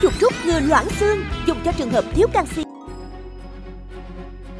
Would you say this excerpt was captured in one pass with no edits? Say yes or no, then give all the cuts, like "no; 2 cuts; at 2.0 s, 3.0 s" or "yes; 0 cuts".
yes; 0 cuts